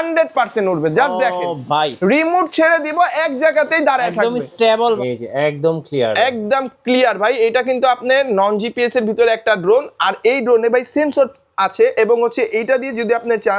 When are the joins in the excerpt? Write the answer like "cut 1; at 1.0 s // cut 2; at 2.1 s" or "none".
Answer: cut 1; at 5.0 s